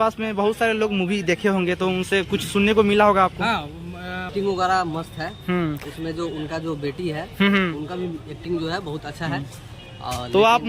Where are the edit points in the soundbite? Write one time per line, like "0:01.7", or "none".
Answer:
0:04.2